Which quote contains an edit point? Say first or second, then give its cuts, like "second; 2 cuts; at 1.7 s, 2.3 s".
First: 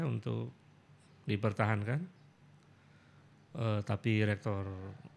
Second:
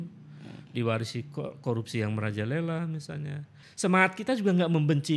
second; 1 cut; at 3.6 s